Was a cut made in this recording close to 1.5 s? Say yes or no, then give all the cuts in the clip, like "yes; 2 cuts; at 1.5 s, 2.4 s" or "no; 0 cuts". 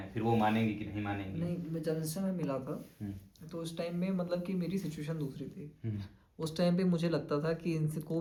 no; 0 cuts